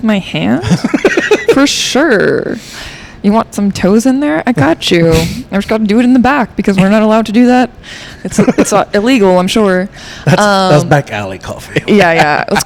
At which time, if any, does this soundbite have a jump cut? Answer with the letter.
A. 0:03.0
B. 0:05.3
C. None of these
C